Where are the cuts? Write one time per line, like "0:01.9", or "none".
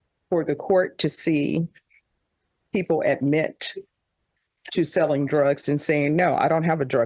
none

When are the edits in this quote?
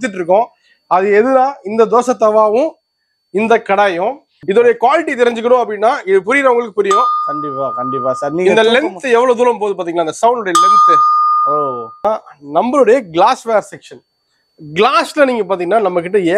0:04.3
0:12.0

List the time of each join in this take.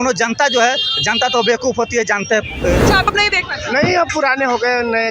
0:03.1

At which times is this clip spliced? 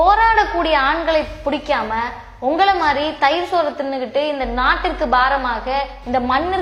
none

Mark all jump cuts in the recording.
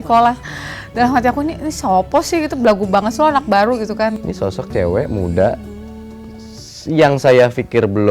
0:04.1

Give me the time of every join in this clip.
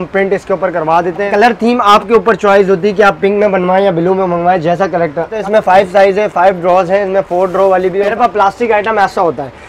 0:01.3
0:05.4
0:08.1

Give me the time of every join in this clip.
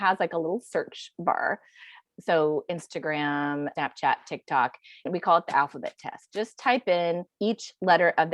0:02.0
0:03.7
0:05.1
0:07.3

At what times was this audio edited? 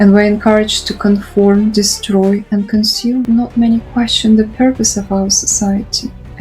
0:03.2

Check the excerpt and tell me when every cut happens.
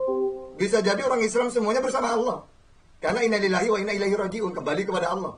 none

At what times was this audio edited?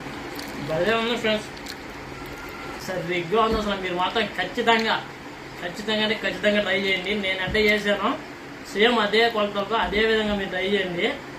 0:02.8

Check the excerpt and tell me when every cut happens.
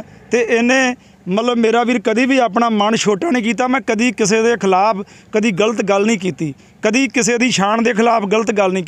none

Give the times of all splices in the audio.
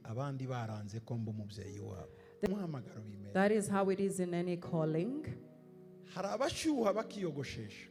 0:02.5

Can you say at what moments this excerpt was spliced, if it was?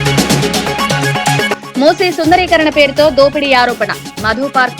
0:01.1

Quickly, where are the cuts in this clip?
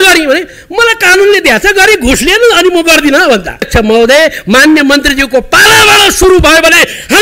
0:03.7

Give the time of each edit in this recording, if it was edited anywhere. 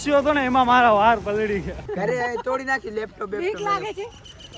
0:02.2

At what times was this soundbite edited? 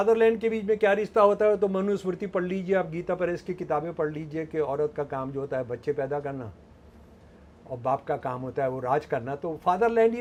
none

